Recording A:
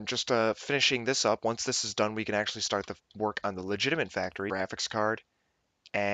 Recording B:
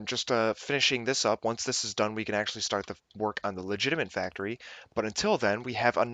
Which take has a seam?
B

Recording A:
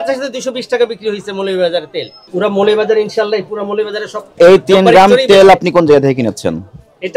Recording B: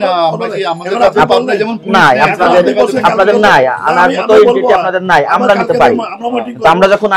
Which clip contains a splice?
A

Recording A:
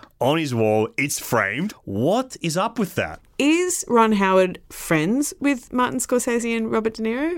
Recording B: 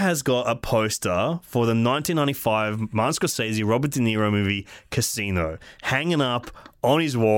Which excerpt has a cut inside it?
A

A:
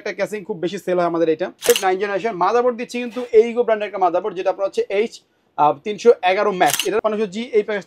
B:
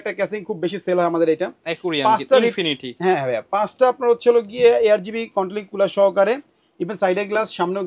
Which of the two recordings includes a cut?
A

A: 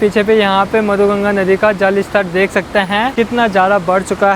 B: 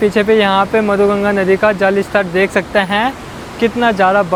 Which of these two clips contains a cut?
A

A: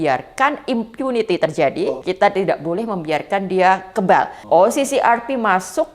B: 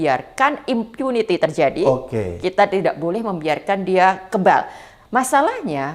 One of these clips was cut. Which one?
A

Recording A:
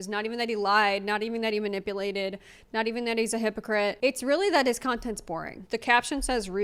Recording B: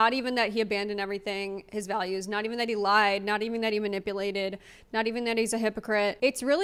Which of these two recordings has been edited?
A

